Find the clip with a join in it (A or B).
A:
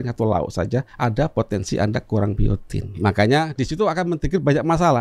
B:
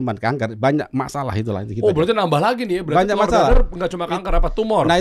A